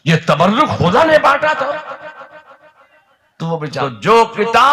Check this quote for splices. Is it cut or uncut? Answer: cut